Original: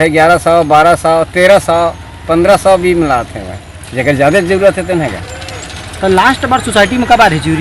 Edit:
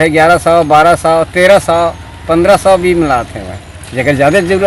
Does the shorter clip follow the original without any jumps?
yes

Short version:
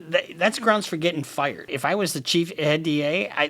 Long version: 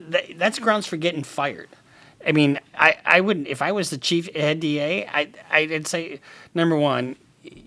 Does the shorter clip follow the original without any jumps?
no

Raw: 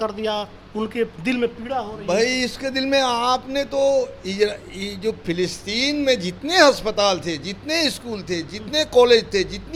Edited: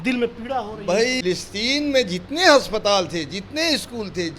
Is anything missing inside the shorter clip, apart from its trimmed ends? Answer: yes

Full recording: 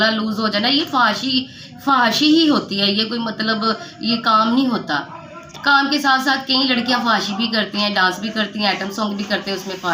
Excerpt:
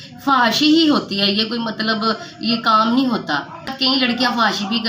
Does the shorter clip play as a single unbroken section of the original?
no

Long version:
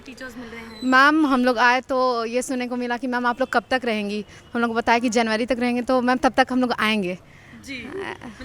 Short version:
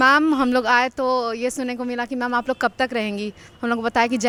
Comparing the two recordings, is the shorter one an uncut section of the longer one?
yes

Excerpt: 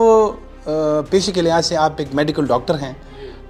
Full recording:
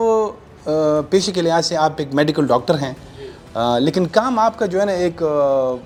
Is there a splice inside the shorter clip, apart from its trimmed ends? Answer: no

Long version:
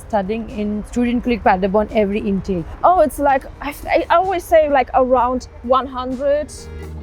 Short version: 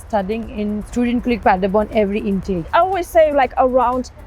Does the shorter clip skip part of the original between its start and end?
yes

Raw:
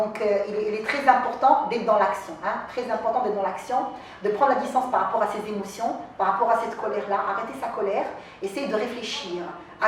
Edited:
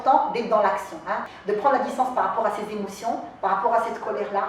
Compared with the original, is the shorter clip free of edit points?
no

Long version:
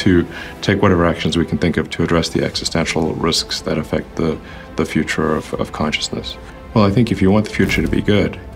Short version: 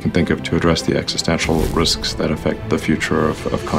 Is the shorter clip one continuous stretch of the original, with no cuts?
no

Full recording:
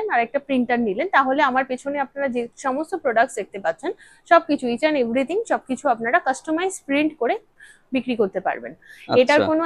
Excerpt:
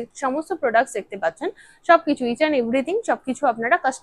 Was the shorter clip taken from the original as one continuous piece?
yes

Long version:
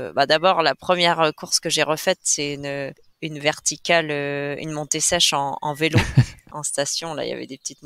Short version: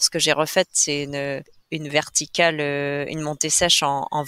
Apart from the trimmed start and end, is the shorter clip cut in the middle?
no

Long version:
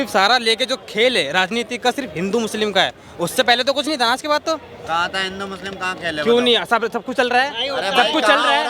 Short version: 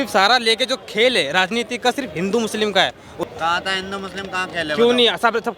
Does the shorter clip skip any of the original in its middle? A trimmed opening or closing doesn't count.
yes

